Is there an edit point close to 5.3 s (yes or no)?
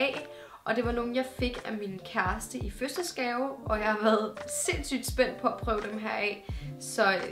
no